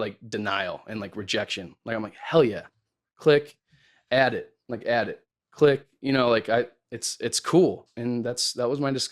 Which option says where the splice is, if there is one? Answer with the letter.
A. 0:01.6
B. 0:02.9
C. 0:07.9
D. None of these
C